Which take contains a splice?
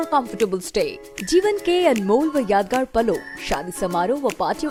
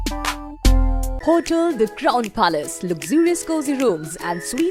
second; 1 cut; at 1.1 s

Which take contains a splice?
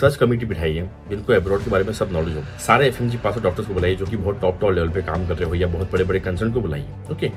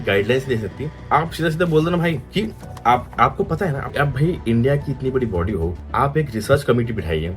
second; 1 cut; at 3.9 s

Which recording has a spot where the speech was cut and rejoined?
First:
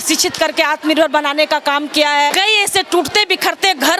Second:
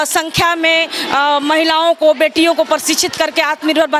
first; 1 cut; at 2.3 s

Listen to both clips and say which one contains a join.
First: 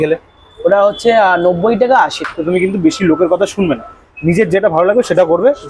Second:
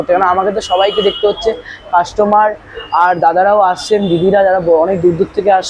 first; 1 cut; at 2.2 s

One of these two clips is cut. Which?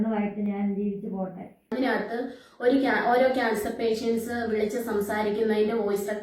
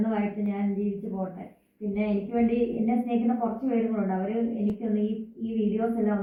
first; 1 cut; at 1.5 s

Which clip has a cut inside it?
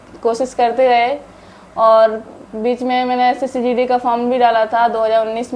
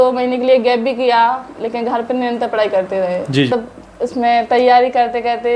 second; 1 cut; at 3.5 s

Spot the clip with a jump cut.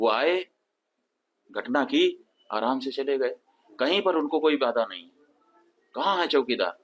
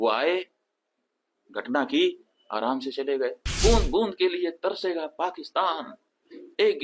second; 1 cut; at 3.5 s

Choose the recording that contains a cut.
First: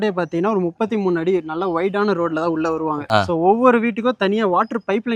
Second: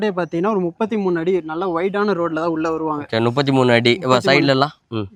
first; 1 cut; at 3.0 s

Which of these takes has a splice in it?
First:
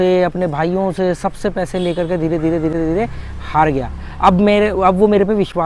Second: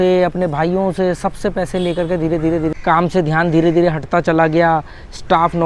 second; 1 cut; at 2.7 s

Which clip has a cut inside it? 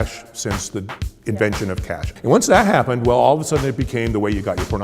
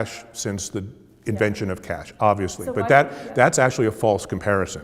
first; 1 cut; at 2.0 s

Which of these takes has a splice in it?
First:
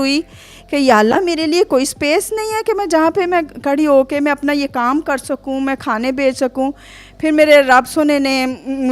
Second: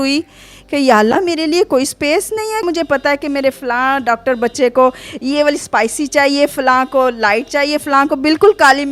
second; 1 cut; at 2.6 s

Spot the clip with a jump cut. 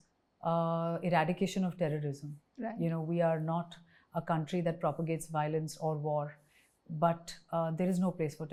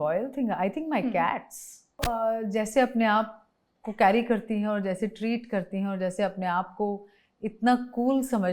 second; 1 cut; at 2.0 s

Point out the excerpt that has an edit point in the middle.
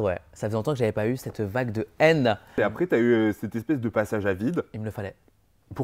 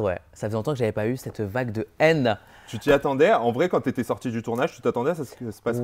first; 1 cut; at 2.5 s

